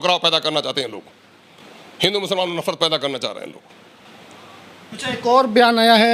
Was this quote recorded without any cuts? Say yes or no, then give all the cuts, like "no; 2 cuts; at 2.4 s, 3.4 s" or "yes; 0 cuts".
yes; 0 cuts